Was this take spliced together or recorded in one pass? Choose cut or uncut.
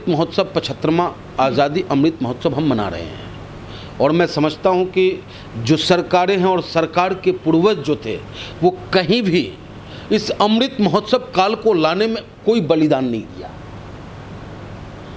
uncut